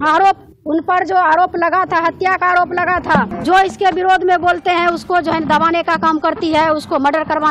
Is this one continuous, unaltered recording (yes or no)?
no